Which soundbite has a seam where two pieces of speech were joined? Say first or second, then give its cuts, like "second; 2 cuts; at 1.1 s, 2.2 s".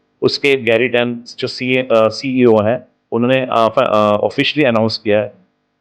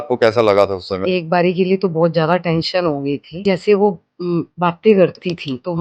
second; 2 cuts; at 1.0 s, 3.4 s